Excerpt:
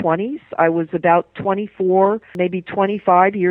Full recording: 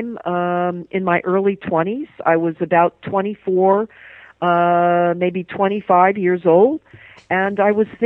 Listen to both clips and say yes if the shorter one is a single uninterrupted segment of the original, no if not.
no